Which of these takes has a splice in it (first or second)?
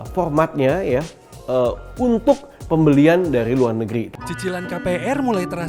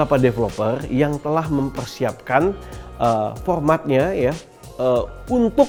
first